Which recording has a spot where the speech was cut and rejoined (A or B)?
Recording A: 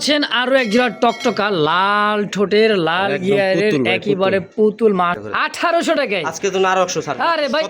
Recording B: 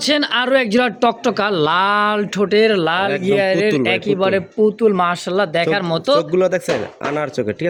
A